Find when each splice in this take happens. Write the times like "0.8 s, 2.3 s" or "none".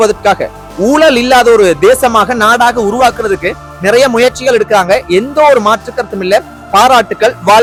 none

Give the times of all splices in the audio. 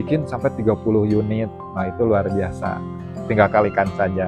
none

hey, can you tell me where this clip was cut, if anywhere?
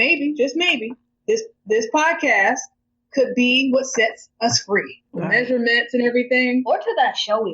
5.0 s

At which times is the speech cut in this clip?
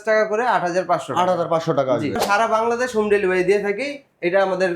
2.2 s

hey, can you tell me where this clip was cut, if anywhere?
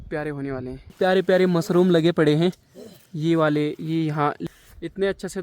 0.9 s, 4.4 s

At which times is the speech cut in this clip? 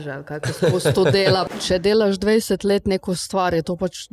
1.5 s

